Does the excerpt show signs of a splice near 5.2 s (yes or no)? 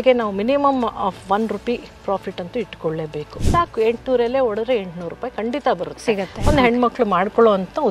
no